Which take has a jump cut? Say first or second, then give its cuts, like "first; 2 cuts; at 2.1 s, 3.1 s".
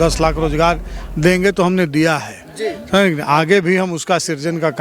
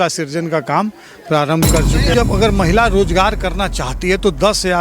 second; 1 cut; at 2.1 s